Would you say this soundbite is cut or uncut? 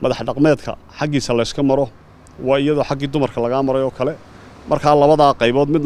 uncut